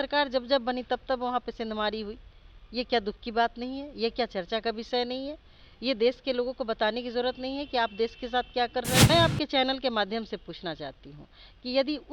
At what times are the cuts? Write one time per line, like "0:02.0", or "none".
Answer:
0:09.0

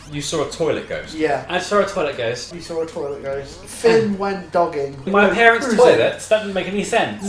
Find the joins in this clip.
0:02.5
0:03.7
0:05.1

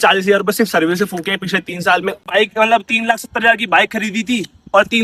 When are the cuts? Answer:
0:02.3

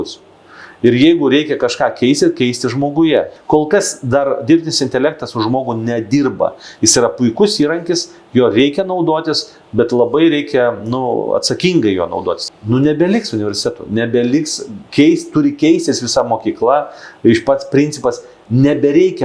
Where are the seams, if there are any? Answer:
0:03.4
0:12.4

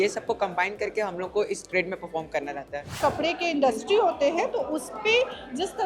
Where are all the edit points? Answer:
0:03.0

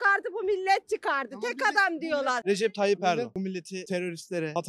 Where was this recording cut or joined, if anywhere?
0:02.4
0:03.3

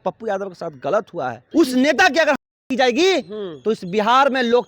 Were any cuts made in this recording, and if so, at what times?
0:01.4

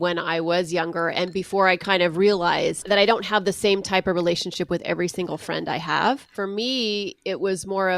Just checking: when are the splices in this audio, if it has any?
0:02.8
0:06.3

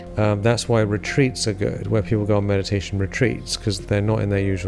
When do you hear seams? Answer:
none

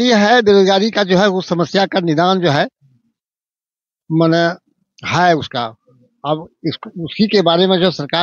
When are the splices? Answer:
none

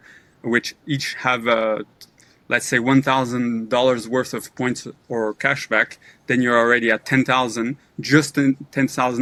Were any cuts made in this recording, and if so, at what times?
none

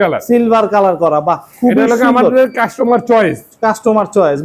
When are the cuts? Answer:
none

